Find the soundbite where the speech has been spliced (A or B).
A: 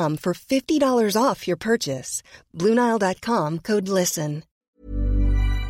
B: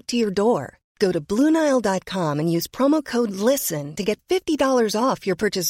A